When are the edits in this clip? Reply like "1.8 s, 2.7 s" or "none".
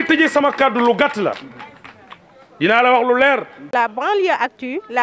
3.7 s